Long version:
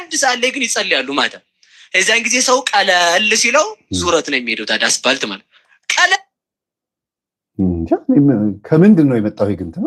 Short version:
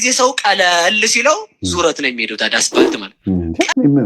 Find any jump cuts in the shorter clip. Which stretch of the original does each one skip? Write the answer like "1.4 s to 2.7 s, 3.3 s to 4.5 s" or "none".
5.4 s to 7.4 s